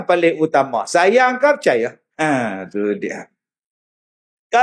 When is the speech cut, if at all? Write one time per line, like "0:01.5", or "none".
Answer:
0:02.0